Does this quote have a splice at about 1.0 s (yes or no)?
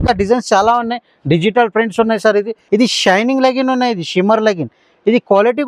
no